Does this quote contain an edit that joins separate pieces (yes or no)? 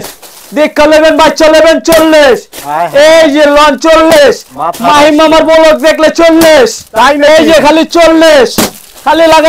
no